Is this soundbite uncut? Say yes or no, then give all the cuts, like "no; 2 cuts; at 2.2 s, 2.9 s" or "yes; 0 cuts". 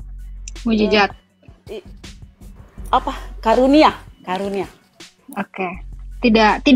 yes; 0 cuts